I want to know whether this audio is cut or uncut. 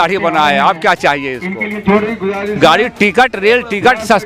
cut